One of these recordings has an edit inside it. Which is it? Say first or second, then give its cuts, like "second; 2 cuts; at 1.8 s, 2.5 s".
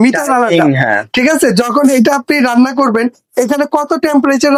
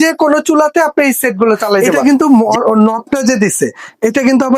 second; 1 cut; at 1.9 s